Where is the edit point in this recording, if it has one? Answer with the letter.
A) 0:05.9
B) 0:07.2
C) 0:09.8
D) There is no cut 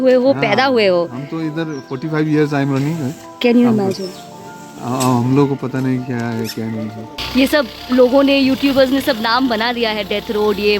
B